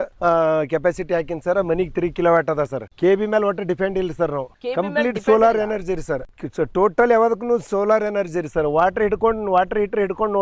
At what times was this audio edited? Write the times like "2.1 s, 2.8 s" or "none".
none